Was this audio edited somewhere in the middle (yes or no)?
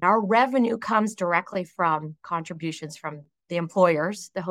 no